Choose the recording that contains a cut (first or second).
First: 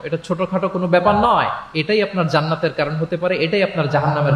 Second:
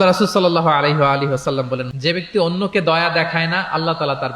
second